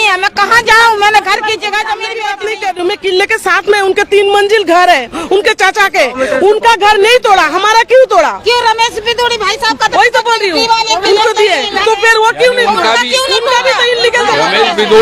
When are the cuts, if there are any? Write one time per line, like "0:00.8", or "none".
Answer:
0:02.1